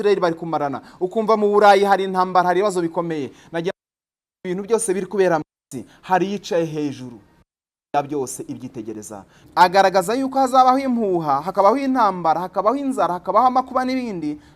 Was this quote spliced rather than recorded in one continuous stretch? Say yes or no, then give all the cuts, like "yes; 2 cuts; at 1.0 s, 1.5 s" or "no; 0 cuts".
yes; 1 cut; at 9.4 s